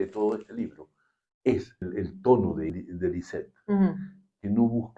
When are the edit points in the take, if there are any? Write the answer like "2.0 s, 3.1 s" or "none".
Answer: 1.8 s, 2.7 s